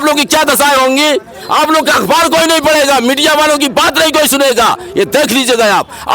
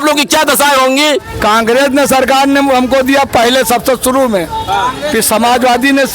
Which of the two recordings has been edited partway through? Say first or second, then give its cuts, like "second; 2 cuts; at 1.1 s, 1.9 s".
second; 1 cut; at 1.3 s